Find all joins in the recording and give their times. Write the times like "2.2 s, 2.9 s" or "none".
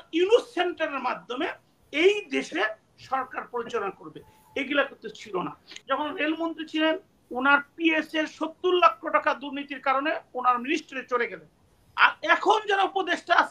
5.8 s